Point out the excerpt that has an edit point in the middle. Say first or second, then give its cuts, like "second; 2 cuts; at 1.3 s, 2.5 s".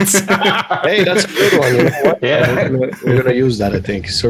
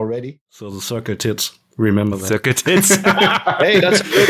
second; 1 cut; at 0.9 s